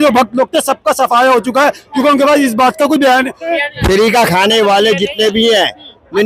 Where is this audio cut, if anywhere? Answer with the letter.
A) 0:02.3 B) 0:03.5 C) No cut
B